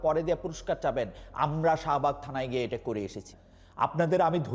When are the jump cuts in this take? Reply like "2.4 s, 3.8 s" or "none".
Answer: 3.4 s